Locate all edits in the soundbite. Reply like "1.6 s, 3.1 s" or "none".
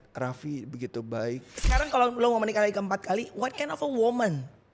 1.5 s